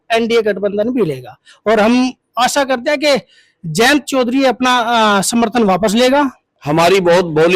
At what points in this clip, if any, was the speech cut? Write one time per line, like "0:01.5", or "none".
0:06.5